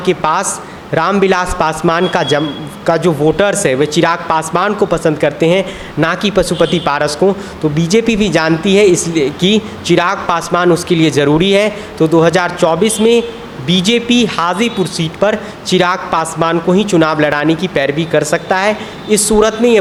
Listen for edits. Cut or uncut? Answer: uncut